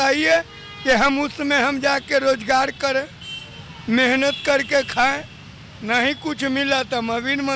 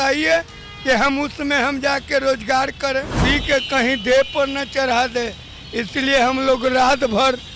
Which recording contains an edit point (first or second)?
second